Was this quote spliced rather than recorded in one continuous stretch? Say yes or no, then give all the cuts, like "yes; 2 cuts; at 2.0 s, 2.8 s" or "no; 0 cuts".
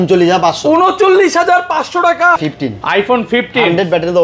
yes; 1 cut; at 2.4 s